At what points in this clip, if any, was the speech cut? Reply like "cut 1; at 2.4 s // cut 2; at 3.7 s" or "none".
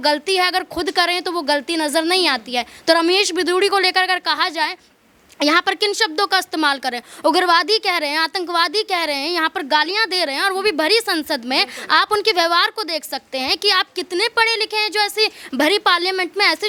none